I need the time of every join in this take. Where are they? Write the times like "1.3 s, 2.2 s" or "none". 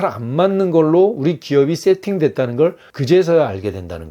2.9 s